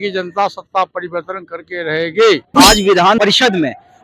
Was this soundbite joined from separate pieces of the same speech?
yes; 1 cut; at 2.5 s

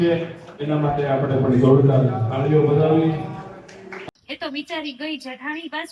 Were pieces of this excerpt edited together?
yes; 1 cut; at 4.1 s

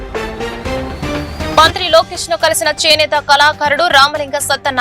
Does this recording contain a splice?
yes; 1 cut; at 1.5 s

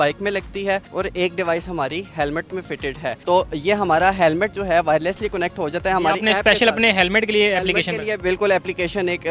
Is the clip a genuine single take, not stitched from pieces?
yes; 0 cuts

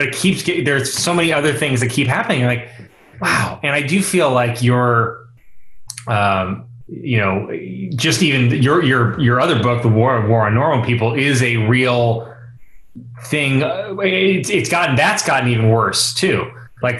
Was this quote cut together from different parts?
no; 0 cuts

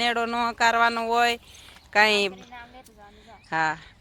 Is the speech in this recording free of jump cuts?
yes; 0 cuts

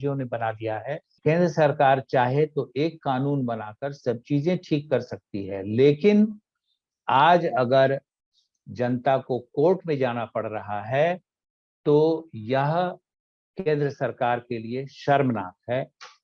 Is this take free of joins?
no; 1 cut; at 1.2 s

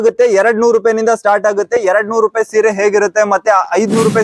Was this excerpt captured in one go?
yes; 0 cuts

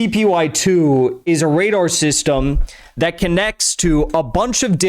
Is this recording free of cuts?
no; 1 cut; at 1.2 s

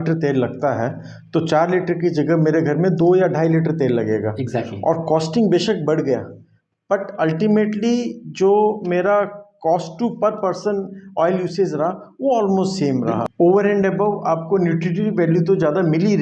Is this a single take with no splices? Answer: no; 1 cut; at 13.2 s

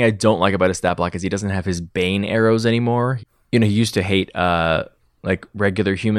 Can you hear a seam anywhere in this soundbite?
no; 0 cuts

